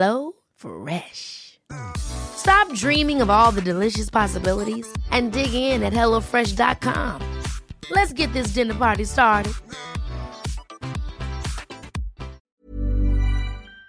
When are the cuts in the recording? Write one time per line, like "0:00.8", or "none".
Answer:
0:12.5